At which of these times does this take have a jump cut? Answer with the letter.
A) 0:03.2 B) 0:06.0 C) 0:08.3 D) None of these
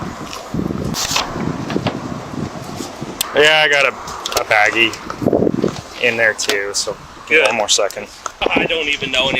C